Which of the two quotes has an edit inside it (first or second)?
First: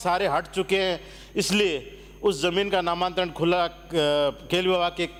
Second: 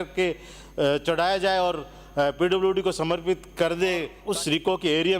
second